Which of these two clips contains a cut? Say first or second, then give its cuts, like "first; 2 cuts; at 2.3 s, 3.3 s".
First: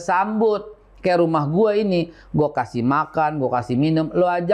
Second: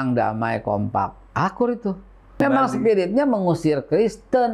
second; 1 cut; at 2.3 s